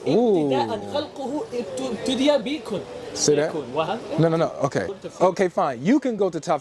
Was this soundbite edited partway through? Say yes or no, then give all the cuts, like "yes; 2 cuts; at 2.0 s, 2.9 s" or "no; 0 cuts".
yes; 1 cut; at 5.0 s